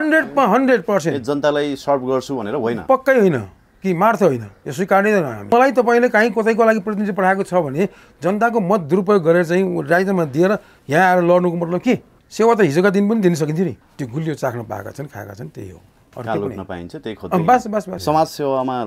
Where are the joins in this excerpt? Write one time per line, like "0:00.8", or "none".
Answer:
0:05.5
0:12.2
0:13.8
0:17.9